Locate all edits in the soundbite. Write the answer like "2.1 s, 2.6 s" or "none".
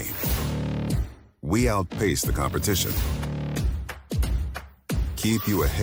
none